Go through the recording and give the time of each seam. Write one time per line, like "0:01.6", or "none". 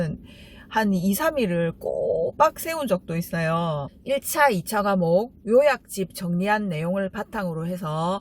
0:03.9